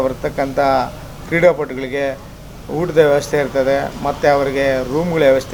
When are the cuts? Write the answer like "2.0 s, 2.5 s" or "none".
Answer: none